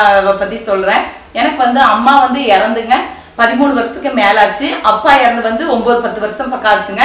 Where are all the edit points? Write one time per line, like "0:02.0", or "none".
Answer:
none

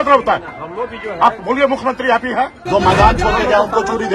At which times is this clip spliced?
0:02.6

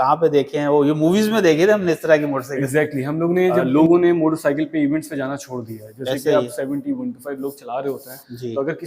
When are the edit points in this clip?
0:03.6

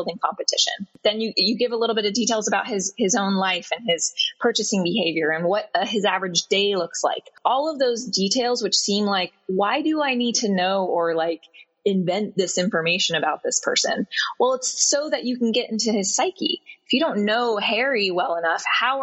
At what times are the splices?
0:00.9
0:07.3

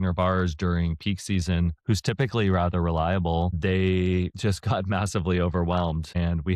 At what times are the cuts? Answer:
none

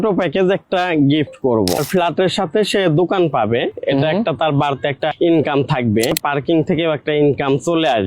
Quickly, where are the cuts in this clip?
0:01.8
0:05.1
0:06.1

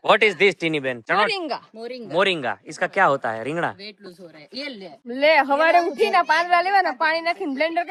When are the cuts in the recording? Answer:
none

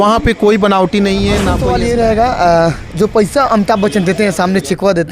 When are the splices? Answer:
0:01.6

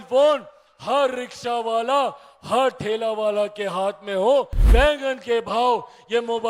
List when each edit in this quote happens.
0:04.6

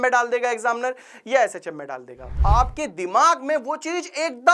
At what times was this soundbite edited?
0:02.4

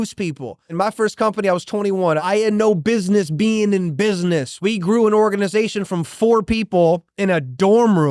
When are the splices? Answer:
0:00.7
0:02.2
0:04.5

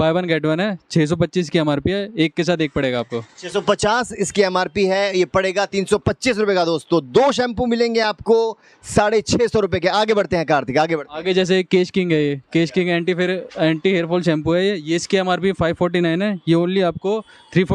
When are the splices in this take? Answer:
none

